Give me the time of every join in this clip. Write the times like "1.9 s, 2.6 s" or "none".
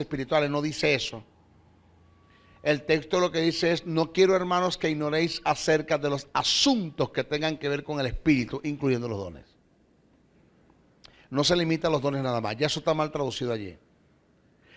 none

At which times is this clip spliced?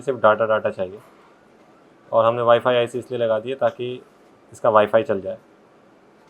none

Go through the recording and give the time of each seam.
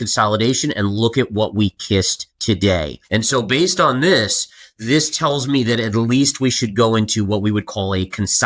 2.2 s, 3.0 s

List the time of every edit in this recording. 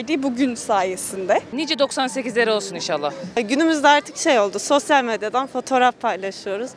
1.5 s, 3.4 s

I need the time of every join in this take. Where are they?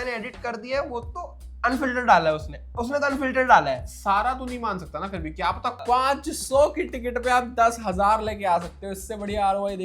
5.8 s

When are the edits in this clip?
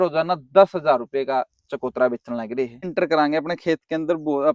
2.9 s

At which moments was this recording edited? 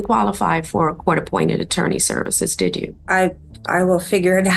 3.0 s

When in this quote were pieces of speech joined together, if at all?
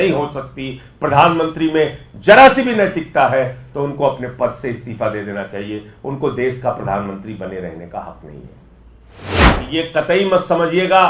9.2 s

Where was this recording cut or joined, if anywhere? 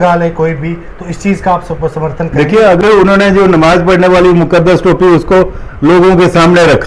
2.8 s

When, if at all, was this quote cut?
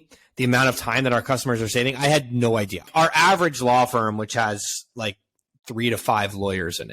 2.9 s

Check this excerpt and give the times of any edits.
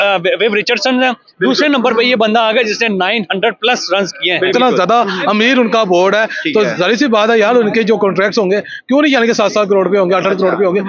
4.5 s

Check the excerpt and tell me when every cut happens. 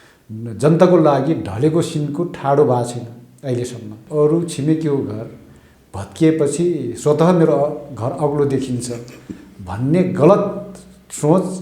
4.0 s

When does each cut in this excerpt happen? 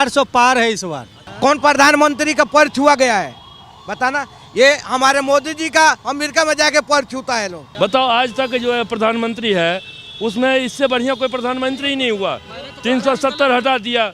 1.2 s, 7.6 s

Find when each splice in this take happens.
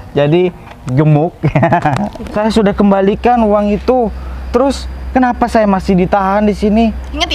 2.2 s

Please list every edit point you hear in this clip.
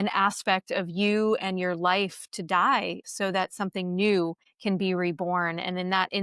3.0 s, 4.5 s

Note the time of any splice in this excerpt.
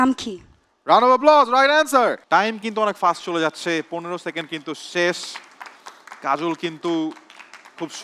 2.2 s

